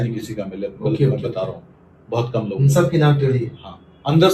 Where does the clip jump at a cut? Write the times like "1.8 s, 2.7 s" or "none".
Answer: none

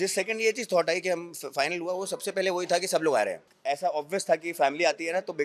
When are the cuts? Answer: 3.5 s

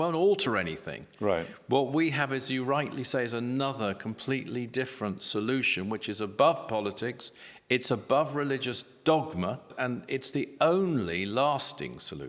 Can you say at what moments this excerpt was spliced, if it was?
9.7 s

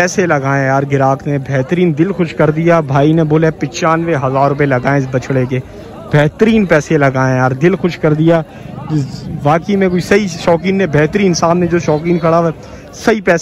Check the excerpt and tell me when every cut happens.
none

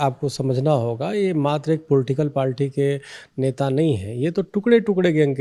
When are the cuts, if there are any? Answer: none

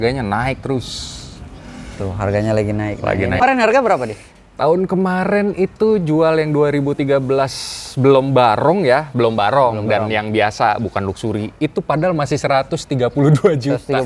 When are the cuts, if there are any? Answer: 3.4 s

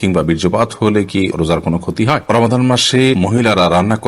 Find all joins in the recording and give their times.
2.3 s, 3.2 s

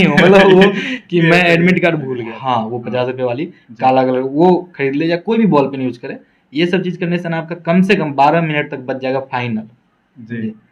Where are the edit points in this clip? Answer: 2.3 s

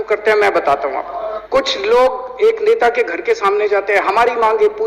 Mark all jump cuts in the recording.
1.1 s

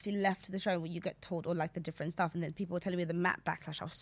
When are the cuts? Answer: none

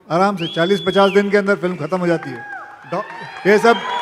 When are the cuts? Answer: none

